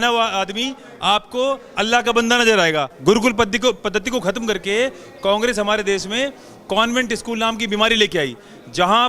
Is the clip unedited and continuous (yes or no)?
no